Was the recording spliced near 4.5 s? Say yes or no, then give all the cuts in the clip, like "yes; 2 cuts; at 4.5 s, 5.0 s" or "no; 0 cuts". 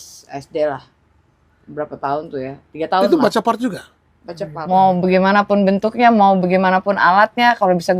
yes; 1 cut; at 4.5 s